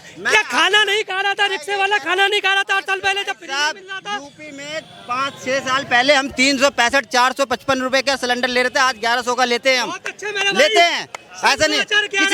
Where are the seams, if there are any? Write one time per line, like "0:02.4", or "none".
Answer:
none